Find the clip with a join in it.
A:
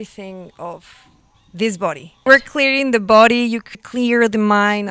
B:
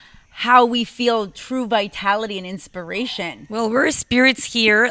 A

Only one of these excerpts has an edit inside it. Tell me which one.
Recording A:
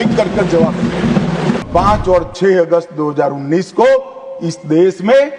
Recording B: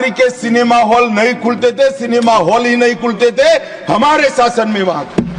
A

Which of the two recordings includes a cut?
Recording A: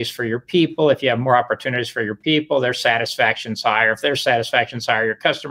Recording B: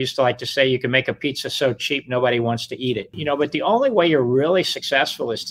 B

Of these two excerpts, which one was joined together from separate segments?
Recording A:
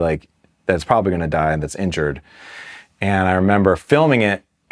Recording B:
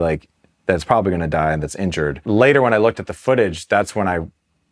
B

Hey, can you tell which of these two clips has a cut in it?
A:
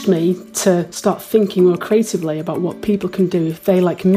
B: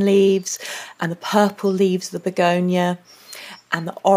A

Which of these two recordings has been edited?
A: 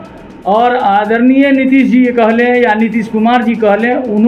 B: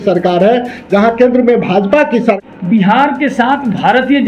B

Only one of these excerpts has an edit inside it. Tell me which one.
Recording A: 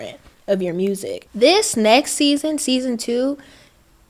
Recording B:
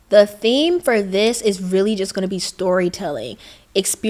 A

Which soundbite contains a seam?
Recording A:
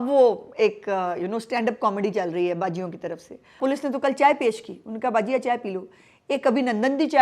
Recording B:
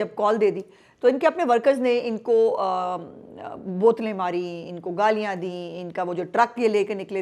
A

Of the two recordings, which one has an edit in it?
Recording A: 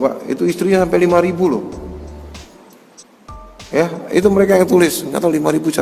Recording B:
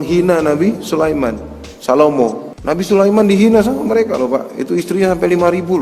B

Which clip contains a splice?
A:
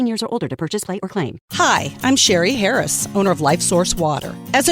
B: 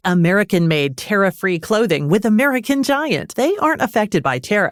A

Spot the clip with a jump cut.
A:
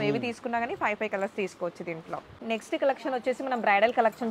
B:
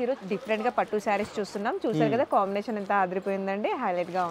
A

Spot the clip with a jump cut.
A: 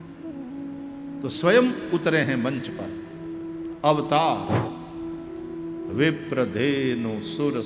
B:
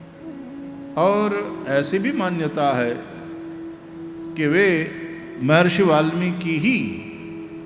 A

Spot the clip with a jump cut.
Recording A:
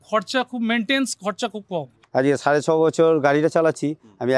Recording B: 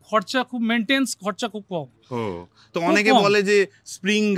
A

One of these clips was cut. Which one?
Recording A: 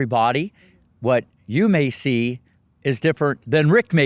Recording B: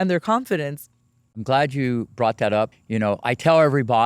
B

